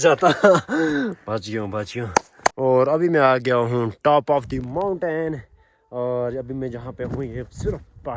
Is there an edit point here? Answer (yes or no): no